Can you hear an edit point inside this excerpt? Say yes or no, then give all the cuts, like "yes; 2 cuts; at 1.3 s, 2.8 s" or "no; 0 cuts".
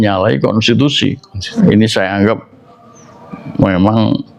no; 0 cuts